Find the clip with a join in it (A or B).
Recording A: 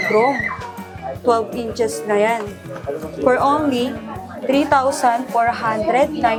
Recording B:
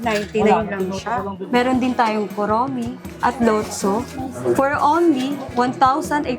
B